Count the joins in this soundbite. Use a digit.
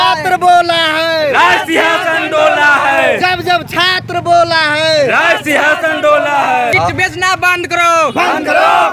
1